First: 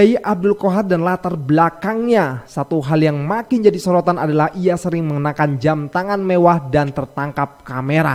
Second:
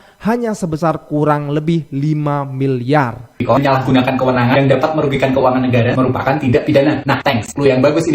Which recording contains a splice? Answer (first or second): second